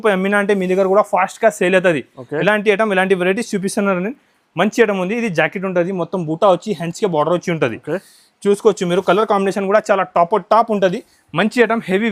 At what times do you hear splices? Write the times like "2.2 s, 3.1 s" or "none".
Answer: none